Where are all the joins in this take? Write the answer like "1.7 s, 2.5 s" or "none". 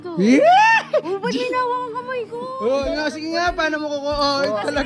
2.9 s

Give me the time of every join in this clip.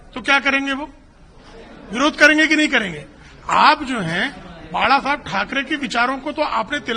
none

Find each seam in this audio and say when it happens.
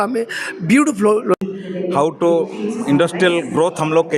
1.4 s

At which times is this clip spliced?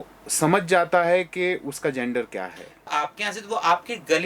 2.9 s

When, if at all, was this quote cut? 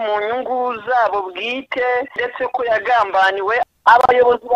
2.2 s, 3.6 s

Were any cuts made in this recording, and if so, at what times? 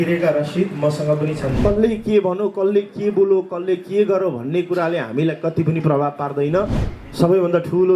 1.6 s, 6.9 s

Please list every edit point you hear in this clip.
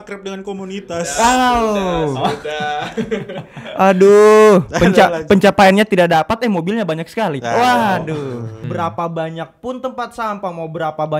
8.6 s

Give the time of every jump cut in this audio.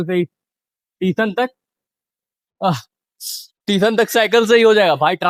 none

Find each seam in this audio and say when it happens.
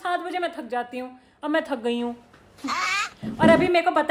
none

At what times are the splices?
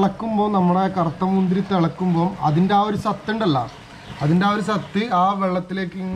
none

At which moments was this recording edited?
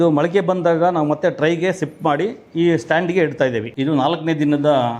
3.7 s

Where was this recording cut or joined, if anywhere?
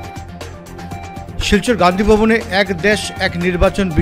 1.0 s

